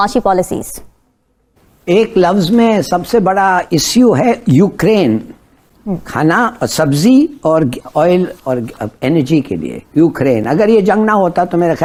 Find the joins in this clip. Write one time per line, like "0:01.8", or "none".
none